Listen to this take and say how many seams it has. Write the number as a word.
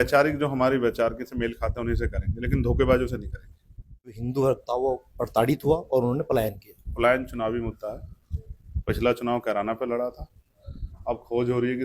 one